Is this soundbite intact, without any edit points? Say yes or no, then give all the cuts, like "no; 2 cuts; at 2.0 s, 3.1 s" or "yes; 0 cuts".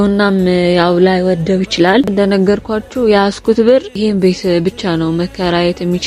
no; 1 cut; at 2.1 s